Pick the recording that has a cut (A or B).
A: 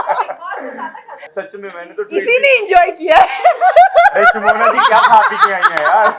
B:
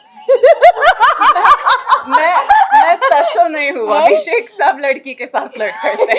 A